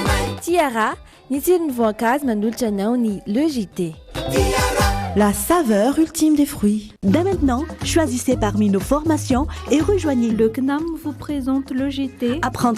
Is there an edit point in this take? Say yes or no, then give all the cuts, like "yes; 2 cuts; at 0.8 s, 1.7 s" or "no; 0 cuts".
yes; 1 cut; at 6.9 s